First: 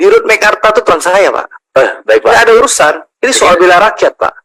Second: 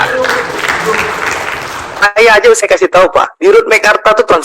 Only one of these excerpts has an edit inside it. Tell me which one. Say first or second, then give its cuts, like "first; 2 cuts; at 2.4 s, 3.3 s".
second; 1 cut; at 1.9 s